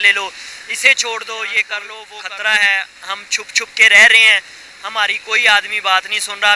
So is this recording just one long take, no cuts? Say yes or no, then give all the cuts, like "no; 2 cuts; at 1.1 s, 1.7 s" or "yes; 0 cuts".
no; 1 cut; at 2.0 s